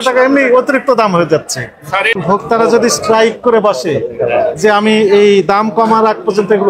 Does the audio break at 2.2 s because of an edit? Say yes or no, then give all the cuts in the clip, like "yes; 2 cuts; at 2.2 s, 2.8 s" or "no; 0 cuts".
yes; 1 cut; at 2.2 s